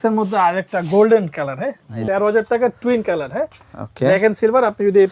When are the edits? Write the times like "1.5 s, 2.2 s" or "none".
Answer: 2.0 s